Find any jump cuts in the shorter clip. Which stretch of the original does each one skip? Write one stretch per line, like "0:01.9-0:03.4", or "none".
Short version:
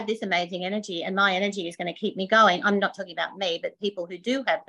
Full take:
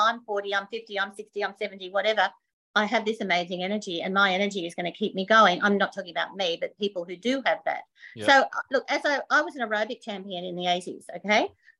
none